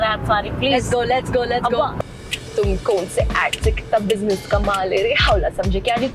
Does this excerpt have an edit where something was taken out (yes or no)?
yes